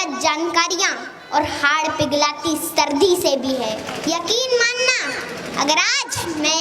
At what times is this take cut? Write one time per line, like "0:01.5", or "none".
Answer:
0:03.9